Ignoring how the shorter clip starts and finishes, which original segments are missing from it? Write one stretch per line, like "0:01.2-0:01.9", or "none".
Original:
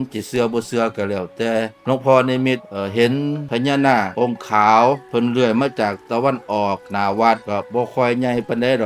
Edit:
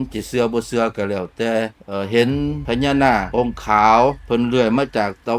0:01.8-0:02.6